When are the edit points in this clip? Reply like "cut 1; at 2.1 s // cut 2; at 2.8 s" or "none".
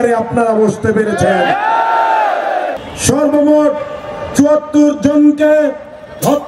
cut 1; at 2.9 s